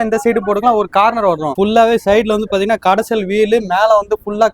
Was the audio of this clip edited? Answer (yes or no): yes